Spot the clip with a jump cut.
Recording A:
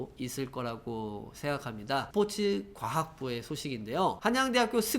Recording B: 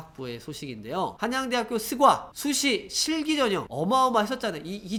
A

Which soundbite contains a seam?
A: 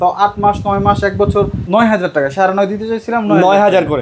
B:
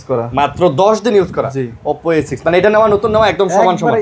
A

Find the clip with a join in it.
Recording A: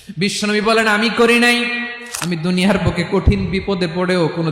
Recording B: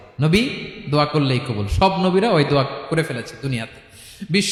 A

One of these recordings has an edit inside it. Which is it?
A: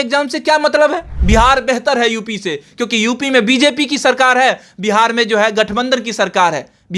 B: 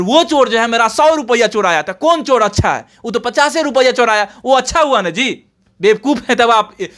A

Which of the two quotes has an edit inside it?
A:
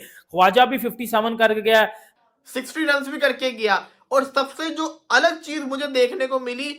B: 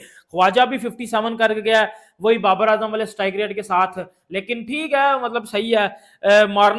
A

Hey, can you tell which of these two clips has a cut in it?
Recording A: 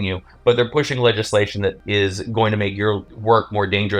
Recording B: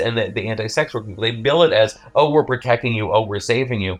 A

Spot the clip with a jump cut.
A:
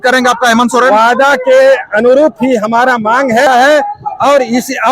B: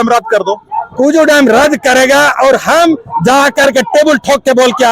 A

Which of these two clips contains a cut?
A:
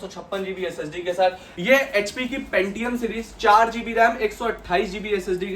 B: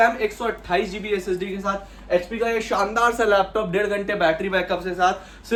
A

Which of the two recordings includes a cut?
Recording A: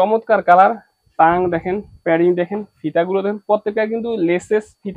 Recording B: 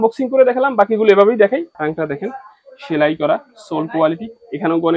B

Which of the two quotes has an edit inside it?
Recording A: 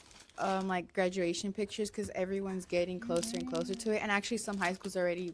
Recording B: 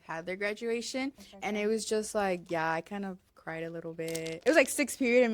B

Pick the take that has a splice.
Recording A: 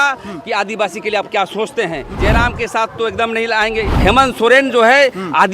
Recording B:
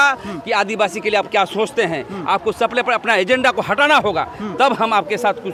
A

